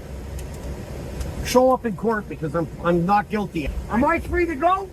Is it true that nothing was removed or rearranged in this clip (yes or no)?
no